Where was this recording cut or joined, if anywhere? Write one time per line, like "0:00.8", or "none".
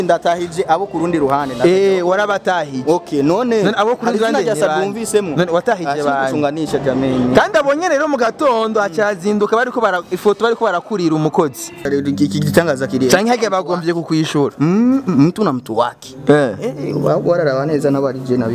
0:11.9